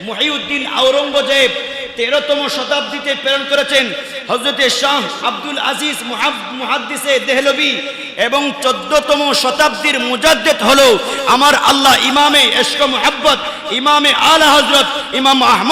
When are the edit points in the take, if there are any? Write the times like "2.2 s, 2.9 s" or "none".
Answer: none